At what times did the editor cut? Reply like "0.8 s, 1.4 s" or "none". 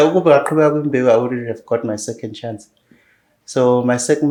none